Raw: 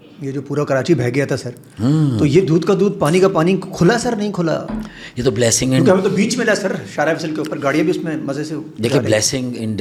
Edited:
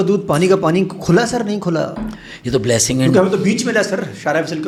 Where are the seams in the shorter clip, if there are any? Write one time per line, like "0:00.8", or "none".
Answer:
none